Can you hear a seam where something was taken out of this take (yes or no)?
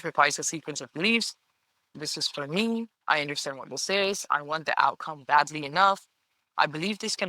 yes